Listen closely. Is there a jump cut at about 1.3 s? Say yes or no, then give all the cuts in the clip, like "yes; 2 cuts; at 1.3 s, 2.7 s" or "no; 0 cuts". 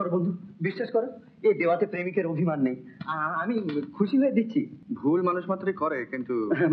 no; 1 cut; at 4.8 s